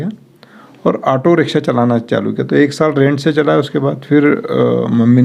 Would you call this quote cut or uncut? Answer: uncut